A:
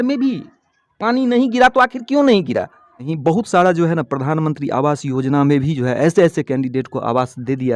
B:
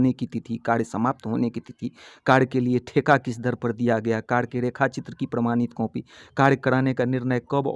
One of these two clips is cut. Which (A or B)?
A